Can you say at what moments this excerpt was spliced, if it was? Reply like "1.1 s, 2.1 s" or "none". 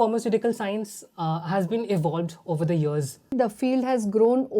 3.3 s